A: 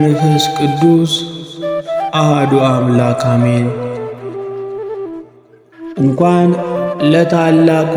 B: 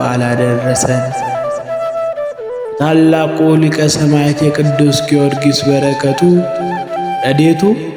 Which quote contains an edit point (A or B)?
A